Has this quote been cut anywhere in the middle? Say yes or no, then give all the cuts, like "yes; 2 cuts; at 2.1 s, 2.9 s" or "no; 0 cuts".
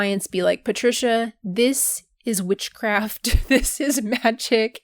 yes; 1 cut; at 1.4 s